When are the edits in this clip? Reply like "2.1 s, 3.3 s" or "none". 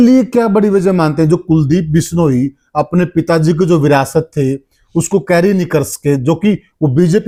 none